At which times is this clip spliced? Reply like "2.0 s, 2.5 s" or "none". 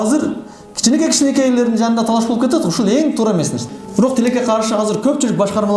3.7 s

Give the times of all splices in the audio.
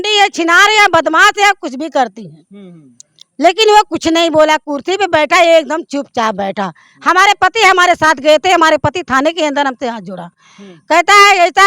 none

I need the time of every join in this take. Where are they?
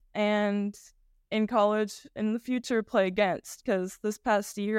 2.1 s

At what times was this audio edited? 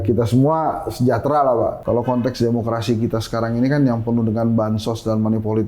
1.8 s

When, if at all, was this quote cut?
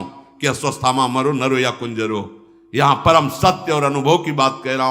none

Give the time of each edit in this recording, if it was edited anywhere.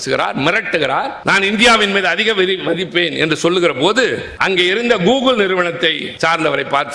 1.2 s, 4.3 s, 6.1 s

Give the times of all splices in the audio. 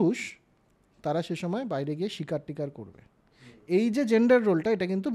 none

